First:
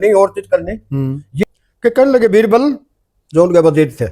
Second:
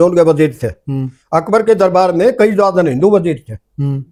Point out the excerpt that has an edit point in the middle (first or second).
first